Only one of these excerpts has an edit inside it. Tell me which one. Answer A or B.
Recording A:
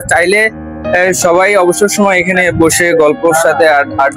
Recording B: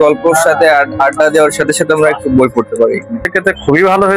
B